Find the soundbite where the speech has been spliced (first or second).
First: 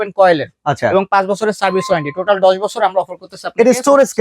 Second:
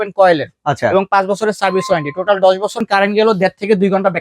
second